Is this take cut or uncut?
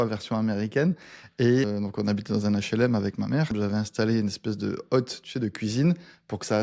cut